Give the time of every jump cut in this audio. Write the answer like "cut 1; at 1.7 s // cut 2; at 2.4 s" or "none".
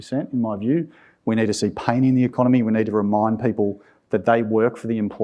cut 1; at 2.6 s